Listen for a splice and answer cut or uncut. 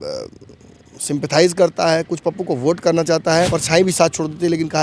cut